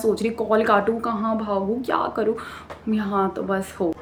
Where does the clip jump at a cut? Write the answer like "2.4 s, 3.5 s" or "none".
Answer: none